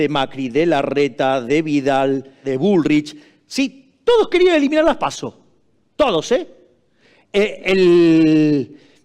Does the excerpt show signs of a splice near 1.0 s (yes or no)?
no